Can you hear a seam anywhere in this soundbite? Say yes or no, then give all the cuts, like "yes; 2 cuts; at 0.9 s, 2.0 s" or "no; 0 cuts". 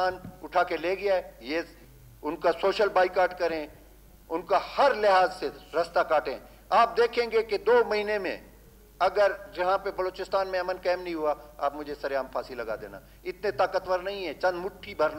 yes; 1 cut; at 1.8 s